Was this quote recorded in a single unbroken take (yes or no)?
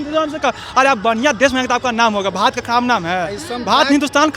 yes